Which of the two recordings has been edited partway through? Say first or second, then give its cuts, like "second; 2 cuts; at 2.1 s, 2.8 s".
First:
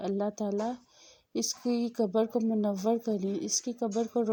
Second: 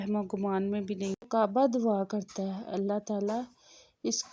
second; 1 cut; at 1.2 s